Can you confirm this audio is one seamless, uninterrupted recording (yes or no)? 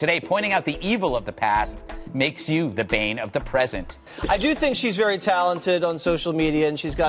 no